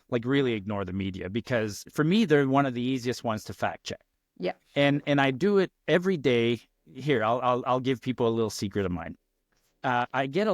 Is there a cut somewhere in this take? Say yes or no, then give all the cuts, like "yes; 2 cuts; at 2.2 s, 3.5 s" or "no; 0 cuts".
yes; 1 cut; at 1.9 s